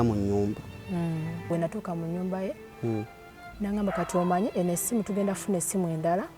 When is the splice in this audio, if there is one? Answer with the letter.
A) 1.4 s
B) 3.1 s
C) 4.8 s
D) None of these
A